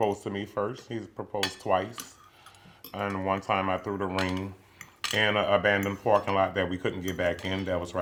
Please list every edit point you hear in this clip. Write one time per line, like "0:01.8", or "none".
none